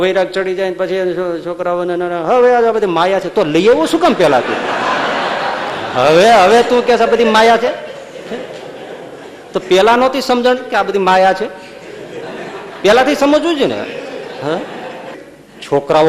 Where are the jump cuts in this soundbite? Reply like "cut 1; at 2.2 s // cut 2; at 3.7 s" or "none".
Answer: cut 1; at 15.2 s